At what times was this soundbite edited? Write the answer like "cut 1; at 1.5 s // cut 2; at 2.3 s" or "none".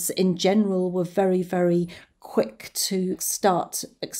cut 1; at 3.3 s